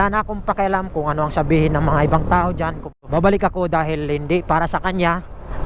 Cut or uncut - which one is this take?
cut